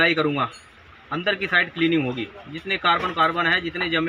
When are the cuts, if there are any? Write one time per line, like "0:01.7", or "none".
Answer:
none